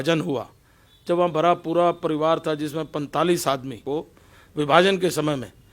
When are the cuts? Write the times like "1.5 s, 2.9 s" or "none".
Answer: 3.8 s